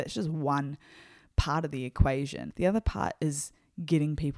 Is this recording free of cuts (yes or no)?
no